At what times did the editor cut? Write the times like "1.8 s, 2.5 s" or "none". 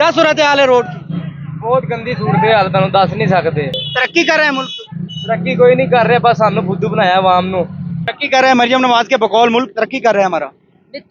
3.8 s, 8.0 s

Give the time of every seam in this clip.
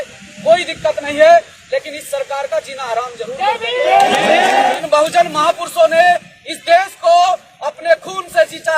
4.8 s

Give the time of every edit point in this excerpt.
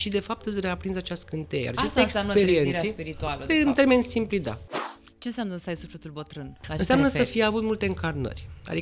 4.9 s

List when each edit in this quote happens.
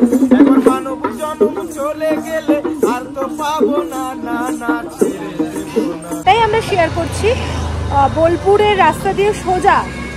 6.2 s

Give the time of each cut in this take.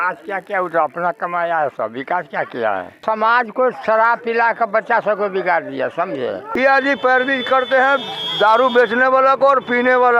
3.0 s, 6.5 s

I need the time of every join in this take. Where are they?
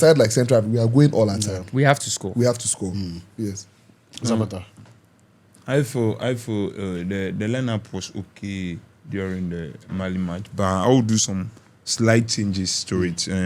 none

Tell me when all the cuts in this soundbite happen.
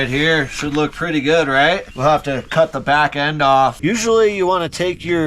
3.8 s

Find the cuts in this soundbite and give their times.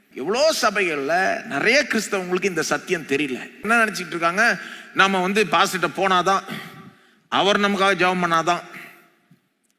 3.7 s

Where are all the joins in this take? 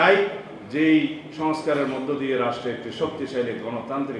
none

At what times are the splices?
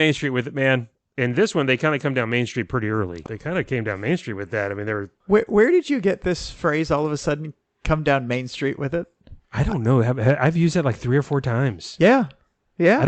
1.0 s, 3.2 s, 5.2 s

